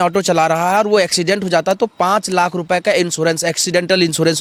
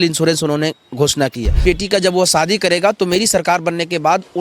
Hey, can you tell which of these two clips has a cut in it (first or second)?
second